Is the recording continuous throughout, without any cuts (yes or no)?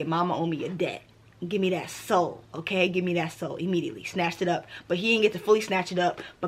yes